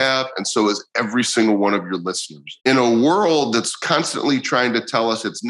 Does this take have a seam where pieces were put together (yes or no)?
yes